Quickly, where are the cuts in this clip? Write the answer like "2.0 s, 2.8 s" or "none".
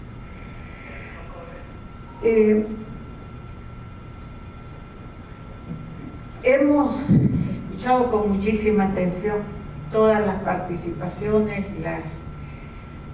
none

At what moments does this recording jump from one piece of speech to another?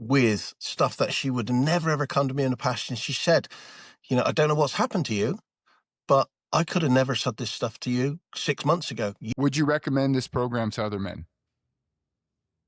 9.2 s

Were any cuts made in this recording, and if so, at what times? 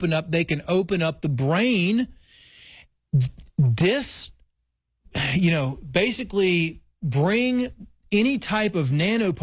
none

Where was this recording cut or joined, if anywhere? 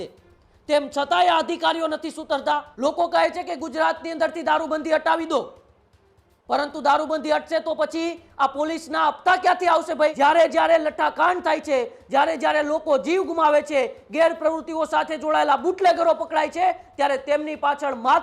2.7 s, 10.1 s

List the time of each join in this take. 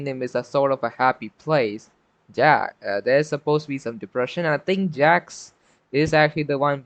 none

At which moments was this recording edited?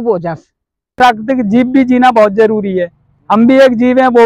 0.9 s

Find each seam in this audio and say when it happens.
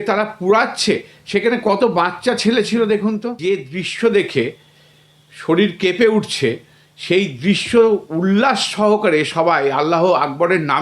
3.3 s

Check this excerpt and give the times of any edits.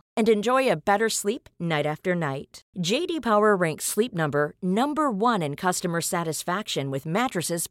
none

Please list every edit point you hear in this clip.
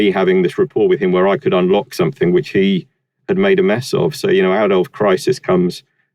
none

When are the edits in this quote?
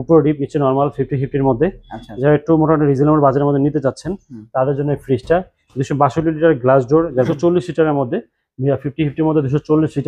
7.3 s

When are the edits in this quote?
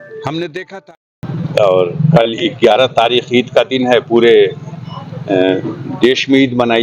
1.0 s

